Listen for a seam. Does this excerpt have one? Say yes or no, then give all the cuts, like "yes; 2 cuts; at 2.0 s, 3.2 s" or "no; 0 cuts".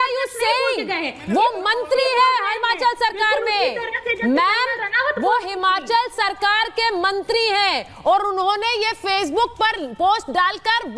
no; 0 cuts